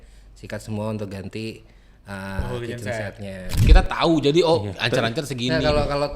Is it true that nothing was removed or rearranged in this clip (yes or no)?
no